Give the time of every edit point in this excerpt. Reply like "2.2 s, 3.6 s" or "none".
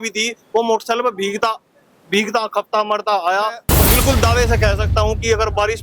3.6 s